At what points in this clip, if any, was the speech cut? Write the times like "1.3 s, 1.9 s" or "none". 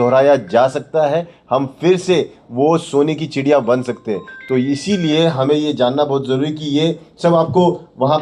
none